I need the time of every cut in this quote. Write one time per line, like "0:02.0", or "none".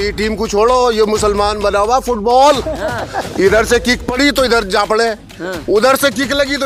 none